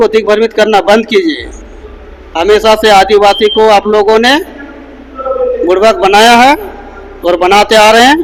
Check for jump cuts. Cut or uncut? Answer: uncut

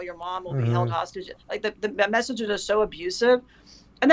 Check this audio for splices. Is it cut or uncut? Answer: uncut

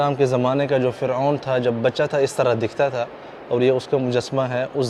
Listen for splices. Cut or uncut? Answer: uncut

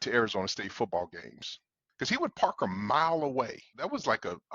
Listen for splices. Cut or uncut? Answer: cut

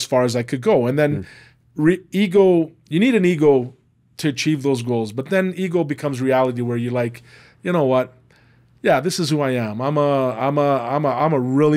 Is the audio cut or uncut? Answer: uncut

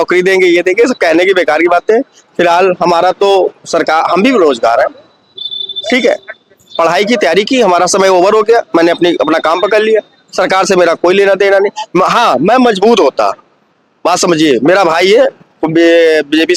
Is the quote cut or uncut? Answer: uncut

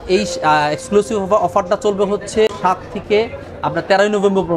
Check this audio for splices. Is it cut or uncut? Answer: uncut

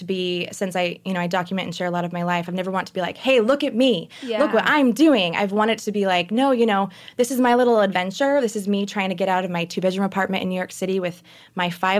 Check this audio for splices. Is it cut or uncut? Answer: uncut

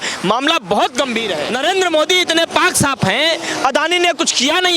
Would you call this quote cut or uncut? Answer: cut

